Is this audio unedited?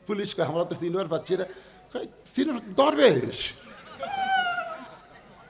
yes; 0 cuts

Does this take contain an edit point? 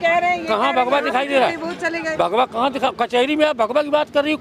no; 0 cuts

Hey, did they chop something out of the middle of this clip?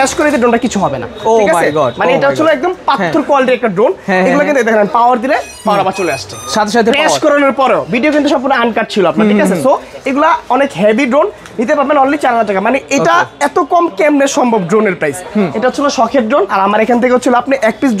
no; 0 cuts

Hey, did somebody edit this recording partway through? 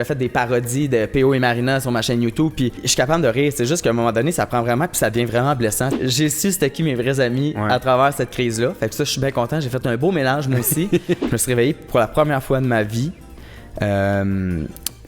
yes; 3 cuts; at 2.9 s, 5.9 s, 11.2 s

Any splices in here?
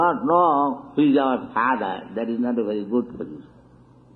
yes; 1 cut; at 2.6 s

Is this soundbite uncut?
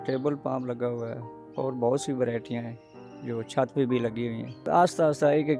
no; 1 cut; at 4.7 s

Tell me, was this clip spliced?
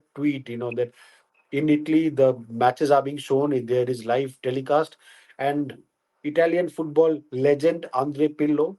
no; 0 cuts

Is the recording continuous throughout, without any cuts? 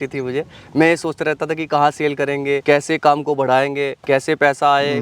no; 2 cuts; at 2.6 s, 4.0 s

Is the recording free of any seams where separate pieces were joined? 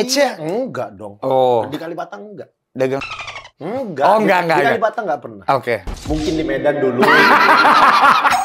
yes; 0 cuts

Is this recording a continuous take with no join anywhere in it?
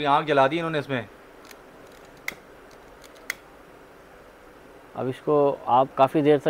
yes; 0 cuts

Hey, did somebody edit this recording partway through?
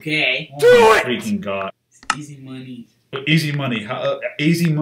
yes; 1 cut; at 1.7 s

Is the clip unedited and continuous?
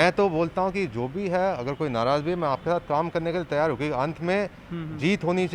yes; 0 cuts

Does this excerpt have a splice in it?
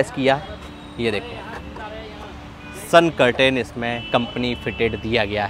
no; 0 cuts

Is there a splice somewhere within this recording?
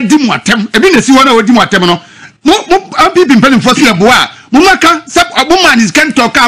no; 0 cuts

